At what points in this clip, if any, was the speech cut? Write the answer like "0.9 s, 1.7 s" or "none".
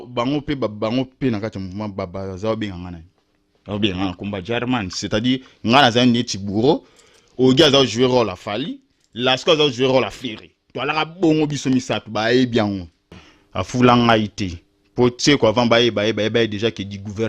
13.1 s